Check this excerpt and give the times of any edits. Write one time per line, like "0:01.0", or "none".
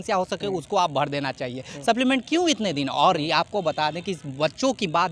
none

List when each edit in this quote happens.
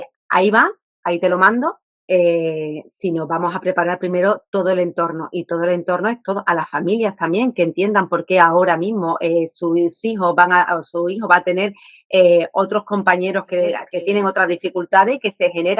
none

